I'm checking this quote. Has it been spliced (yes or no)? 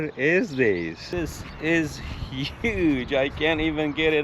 yes